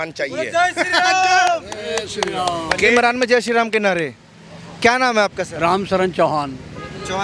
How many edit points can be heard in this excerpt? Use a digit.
0